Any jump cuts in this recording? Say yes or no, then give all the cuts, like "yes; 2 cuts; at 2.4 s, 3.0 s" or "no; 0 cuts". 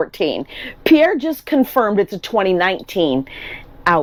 no; 0 cuts